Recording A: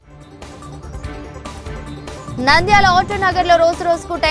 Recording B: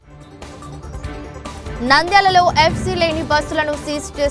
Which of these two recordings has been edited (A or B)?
A